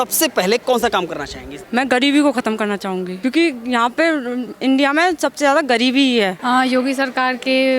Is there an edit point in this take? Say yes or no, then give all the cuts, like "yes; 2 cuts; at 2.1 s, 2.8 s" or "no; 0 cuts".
yes; 1 cut; at 6.3 s